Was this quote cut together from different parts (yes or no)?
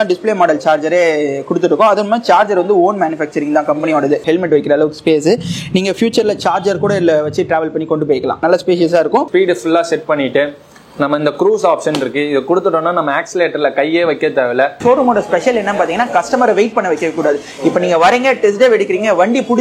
yes